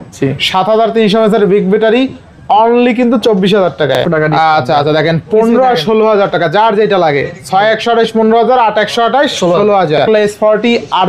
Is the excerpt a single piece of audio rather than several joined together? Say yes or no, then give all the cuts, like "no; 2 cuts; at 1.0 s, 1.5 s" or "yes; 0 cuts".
no; 2 cuts; at 4.0 s, 10.1 s